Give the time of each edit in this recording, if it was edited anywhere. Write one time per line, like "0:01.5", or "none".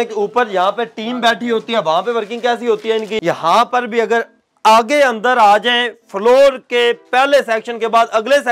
0:03.1